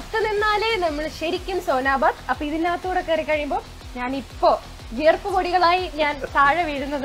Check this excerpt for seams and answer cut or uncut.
uncut